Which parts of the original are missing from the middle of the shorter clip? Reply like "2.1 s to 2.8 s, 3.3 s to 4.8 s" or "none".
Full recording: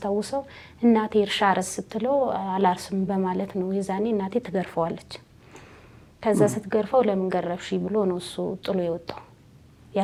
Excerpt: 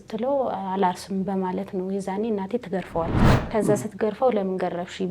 5.1 s to 6.0 s